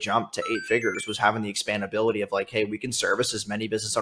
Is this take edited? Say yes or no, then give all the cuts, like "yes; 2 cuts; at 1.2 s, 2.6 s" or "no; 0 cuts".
no; 0 cuts